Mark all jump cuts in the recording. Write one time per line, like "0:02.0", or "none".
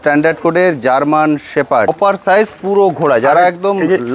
0:01.9